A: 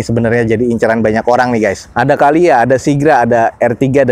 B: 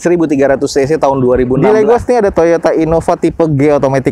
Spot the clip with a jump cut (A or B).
B